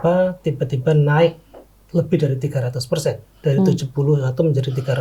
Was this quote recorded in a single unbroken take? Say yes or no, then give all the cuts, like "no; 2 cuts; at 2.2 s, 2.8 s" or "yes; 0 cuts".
yes; 0 cuts